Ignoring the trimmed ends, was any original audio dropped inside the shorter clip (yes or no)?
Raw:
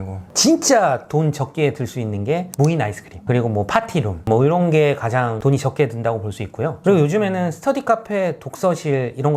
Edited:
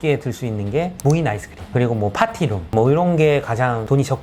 no